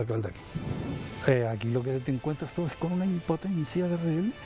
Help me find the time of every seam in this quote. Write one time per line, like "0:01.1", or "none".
0:01.2